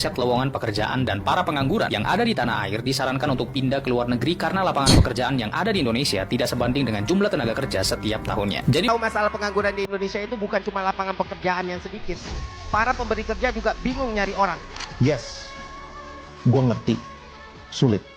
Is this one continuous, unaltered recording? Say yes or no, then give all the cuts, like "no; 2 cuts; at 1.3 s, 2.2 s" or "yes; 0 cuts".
no; 1 cut; at 8.9 s